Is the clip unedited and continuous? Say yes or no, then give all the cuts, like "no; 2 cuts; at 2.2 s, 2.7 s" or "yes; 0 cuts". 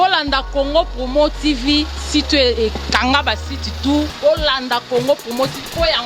no; 1 cut; at 4.1 s